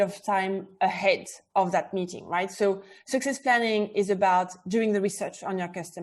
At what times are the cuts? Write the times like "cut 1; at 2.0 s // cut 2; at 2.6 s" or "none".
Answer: none